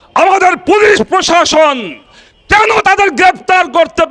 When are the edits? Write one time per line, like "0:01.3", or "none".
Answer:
none